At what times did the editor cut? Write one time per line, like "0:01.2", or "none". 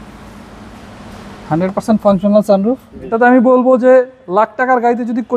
0:03.0